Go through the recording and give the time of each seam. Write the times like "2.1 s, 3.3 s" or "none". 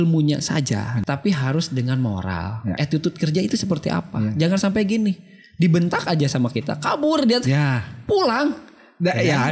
1.0 s, 2.8 s